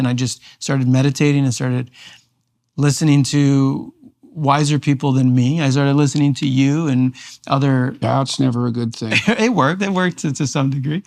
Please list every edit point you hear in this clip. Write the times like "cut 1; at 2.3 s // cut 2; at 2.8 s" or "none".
none